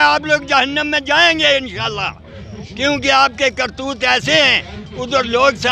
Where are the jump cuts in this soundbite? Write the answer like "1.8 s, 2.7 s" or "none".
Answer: none